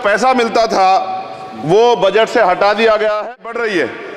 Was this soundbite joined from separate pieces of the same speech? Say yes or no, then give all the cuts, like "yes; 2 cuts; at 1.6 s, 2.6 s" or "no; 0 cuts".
yes; 1 cut; at 3.2 s